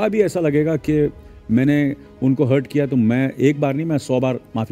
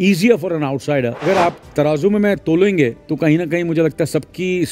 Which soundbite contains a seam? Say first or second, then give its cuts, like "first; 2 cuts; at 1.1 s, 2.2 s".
second; 2 cuts; at 1.2 s, 3.0 s